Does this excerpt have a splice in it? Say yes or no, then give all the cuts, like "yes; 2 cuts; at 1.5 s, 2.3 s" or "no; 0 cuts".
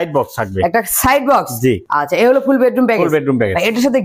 no; 0 cuts